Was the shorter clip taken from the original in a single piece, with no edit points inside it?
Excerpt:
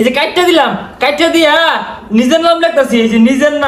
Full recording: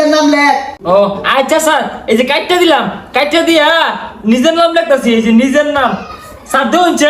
yes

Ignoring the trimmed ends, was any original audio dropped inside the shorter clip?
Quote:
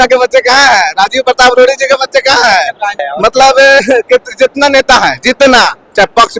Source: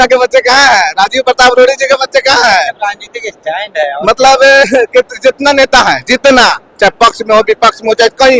yes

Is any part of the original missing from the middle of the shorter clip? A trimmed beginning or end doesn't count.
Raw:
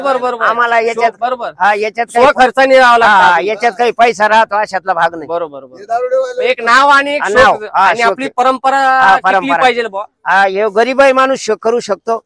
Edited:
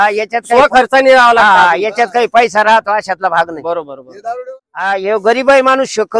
yes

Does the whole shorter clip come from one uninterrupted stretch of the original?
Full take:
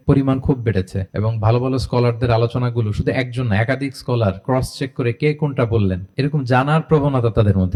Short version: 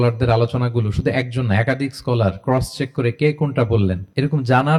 yes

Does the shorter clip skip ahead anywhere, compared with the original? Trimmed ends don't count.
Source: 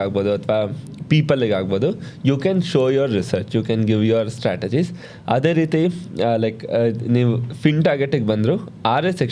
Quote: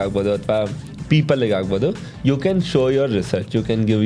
no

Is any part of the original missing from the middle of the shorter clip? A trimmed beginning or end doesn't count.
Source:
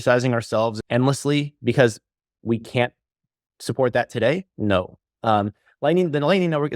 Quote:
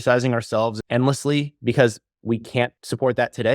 yes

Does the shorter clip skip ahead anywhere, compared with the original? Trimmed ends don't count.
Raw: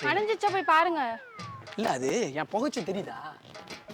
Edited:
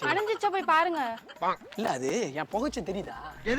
no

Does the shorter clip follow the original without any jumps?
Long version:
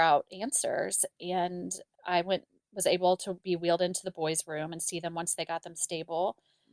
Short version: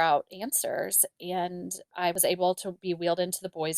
no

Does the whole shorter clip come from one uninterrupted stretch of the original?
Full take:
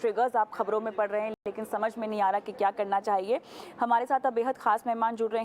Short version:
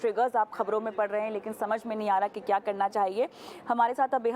no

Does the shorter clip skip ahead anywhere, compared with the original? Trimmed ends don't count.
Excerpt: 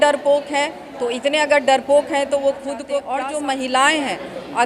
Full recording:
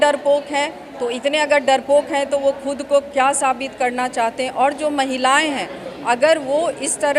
yes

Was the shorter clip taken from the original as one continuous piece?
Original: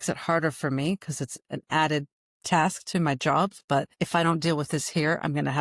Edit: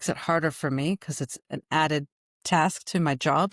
yes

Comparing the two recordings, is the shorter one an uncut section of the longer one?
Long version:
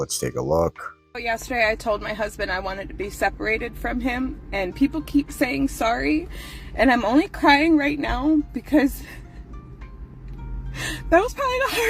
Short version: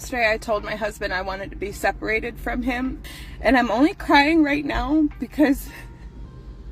no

